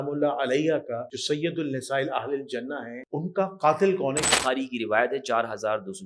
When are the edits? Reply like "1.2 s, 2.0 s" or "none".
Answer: 1.1 s, 3.0 s, 4.3 s